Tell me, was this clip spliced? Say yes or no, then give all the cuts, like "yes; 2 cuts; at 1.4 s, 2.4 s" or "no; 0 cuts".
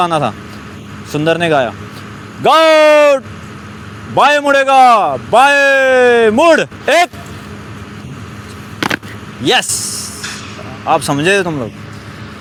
no; 0 cuts